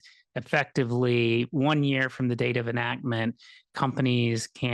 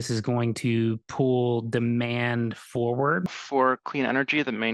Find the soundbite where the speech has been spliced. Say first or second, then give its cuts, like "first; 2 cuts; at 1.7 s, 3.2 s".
second; 1 cut; at 3.4 s